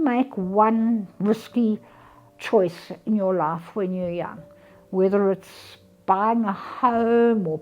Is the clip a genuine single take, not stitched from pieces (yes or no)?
yes